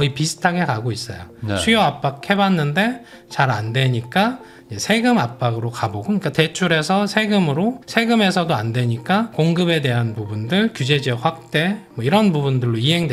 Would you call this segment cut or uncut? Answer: uncut